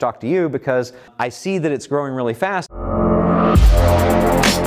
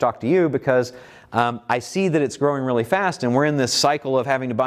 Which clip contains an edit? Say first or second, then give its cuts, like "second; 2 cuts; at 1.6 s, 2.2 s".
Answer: first; 2 cuts; at 1.1 s, 2.7 s